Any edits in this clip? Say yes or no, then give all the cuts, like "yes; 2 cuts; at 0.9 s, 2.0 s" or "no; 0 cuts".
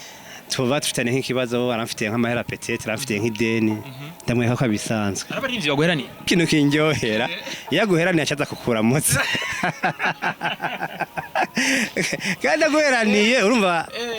yes; 1 cut; at 6.3 s